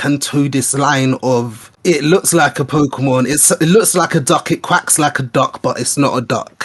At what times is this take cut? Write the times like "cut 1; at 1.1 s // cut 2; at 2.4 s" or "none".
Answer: none